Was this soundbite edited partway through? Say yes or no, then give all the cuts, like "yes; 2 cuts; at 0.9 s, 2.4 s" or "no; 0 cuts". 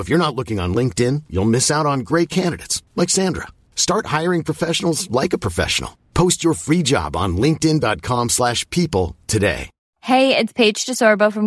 yes; 1 cut; at 9.9 s